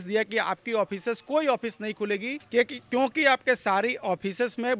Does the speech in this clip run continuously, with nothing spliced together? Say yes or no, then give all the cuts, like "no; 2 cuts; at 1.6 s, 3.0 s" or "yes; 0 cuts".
no; 1 cut; at 2.4 s